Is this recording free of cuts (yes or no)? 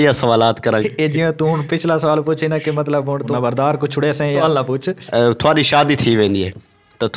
no